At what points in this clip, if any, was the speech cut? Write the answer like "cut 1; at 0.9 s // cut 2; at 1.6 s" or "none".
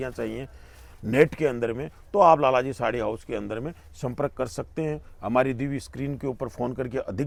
none